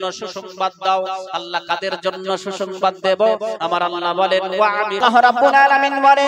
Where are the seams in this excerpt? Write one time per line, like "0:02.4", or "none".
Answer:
0:05.0

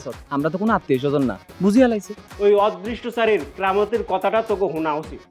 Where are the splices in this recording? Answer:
0:02.2

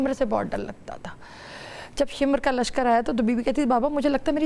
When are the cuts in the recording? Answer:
none

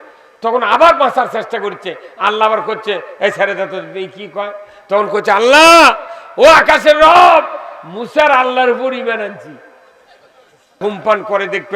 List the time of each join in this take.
0:10.8

